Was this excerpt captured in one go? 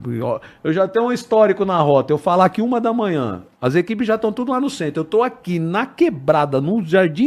yes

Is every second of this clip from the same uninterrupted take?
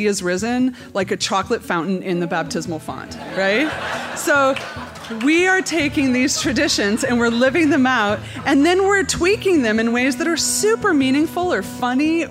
yes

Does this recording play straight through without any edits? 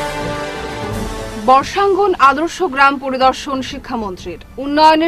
yes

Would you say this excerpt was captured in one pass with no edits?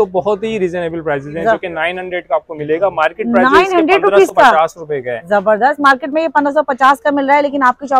yes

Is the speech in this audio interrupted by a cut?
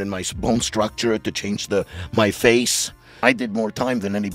yes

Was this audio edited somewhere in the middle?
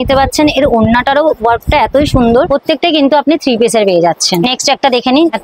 yes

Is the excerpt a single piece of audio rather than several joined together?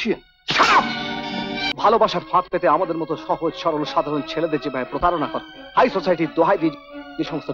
no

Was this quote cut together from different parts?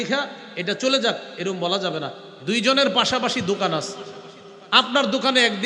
no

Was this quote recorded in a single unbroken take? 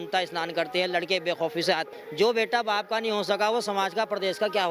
no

